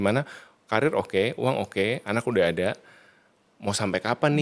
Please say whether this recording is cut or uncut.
uncut